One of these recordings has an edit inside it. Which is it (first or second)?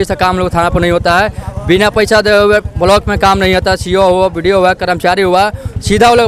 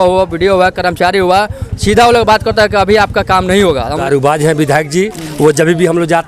second